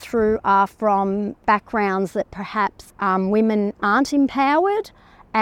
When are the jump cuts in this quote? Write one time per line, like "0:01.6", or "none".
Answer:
0:01.4
0:02.9